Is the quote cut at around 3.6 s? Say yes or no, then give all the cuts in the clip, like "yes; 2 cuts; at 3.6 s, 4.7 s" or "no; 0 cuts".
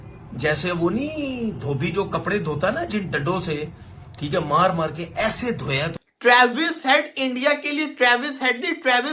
no; 1 cut; at 6.0 s